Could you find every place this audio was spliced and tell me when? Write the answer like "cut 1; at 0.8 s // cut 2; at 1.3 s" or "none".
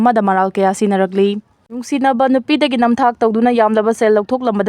cut 1; at 1.7 s